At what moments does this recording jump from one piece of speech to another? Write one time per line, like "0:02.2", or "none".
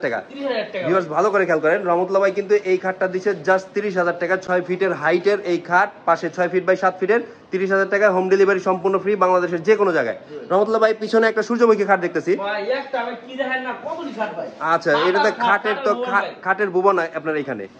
none